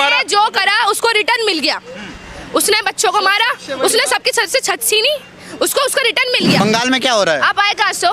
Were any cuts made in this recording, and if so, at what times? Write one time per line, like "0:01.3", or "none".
0:06.6